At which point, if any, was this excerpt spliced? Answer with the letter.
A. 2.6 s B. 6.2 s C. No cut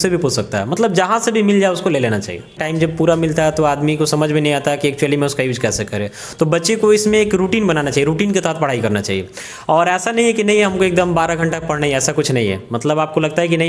A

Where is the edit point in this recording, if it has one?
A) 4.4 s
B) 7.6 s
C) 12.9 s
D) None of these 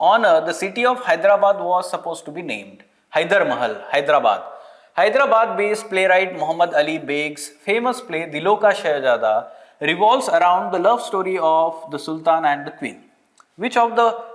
D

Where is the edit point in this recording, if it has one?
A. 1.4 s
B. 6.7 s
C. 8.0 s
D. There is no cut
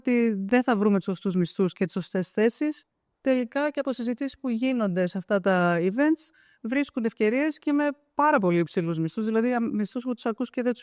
D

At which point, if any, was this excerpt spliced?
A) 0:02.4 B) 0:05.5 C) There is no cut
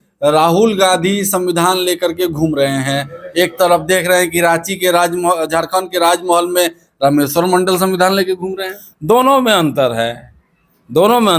C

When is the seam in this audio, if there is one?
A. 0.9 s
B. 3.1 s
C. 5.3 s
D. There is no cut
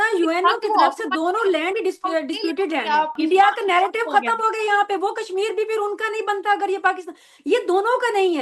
B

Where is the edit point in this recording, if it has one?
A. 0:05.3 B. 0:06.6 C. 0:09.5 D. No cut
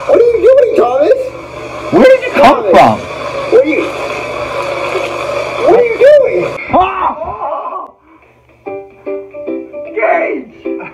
B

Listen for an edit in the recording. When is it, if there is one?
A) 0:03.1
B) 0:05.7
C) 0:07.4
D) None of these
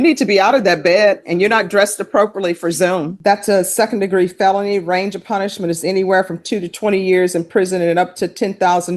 A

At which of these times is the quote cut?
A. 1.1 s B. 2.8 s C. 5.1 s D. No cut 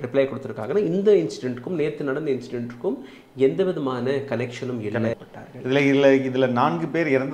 C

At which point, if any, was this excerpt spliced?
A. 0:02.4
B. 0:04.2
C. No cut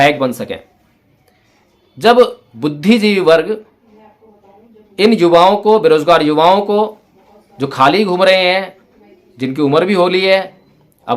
A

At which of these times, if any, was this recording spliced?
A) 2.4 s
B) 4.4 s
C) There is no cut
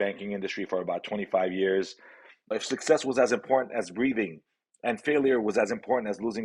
A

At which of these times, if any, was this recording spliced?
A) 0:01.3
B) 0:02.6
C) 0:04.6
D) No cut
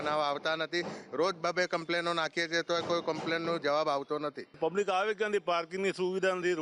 C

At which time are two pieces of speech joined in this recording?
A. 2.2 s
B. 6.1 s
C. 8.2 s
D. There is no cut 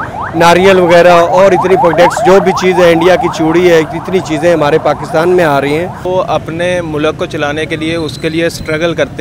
B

